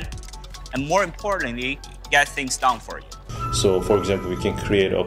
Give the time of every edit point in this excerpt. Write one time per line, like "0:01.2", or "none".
0:03.4